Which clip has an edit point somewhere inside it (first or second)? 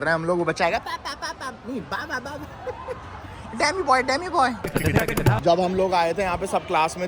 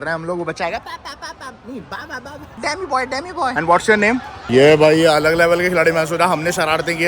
second